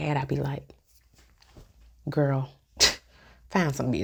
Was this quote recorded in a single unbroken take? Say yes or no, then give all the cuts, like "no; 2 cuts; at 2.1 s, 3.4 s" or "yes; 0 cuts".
yes; 0 cuts